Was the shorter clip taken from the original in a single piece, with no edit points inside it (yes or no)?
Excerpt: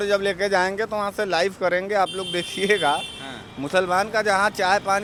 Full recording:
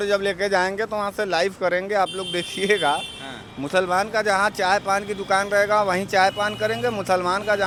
yes